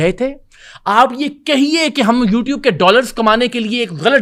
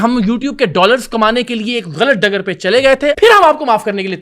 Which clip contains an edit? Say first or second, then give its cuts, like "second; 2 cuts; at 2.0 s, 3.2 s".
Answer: second; 1 cut; at 3.2 s